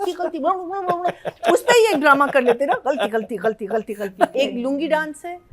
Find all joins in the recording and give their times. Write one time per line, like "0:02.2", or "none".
0:04.3